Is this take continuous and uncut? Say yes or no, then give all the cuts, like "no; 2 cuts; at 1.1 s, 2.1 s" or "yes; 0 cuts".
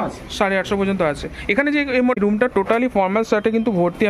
no; 1 cut; at 2.2 s